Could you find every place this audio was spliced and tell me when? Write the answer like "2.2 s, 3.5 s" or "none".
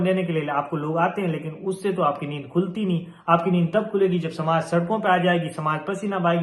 none

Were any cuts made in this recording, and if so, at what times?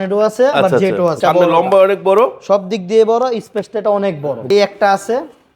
1.2 s, 4.4 s

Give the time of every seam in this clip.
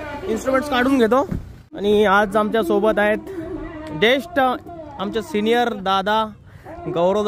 1.6 s

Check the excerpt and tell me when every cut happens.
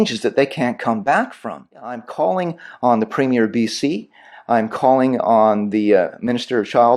2.0 s

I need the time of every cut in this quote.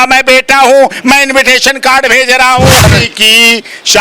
2.9 s

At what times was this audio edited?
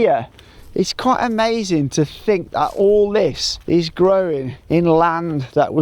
3.5 s, 4.5 s

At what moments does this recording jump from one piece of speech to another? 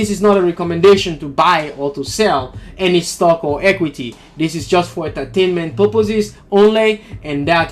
none

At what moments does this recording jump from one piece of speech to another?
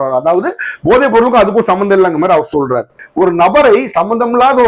3.0 s

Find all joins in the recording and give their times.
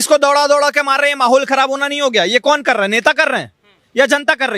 none

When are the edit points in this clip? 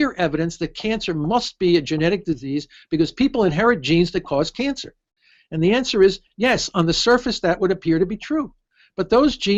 none

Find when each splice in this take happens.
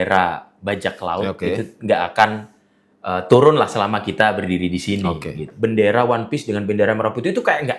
5.5 s

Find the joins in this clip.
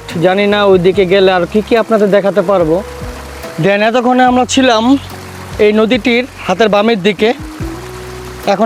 3.4 s

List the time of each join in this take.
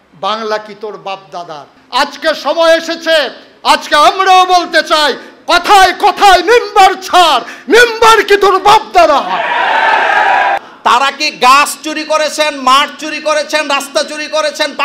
1.7 s, 10.6 s

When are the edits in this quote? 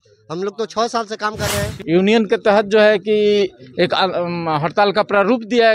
1.8 s

